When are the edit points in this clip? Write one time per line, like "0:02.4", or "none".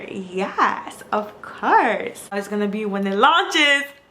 0:02.4

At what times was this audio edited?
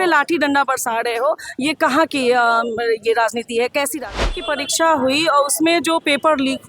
0:04.4

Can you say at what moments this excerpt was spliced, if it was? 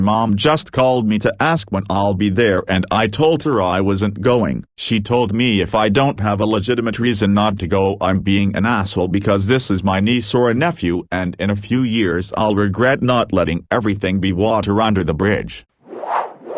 0:15.7

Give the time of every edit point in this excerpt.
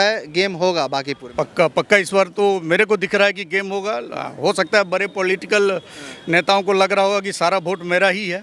0:01.2

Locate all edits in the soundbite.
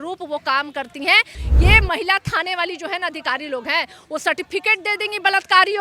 0:01.4

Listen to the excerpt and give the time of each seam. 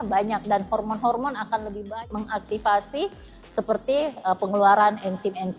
0:01.9

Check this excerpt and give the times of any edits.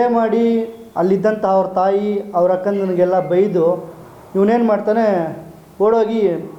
none

